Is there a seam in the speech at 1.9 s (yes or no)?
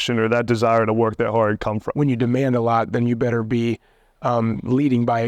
yes